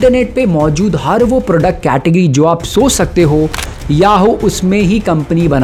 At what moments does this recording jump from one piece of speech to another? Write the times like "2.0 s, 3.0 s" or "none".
none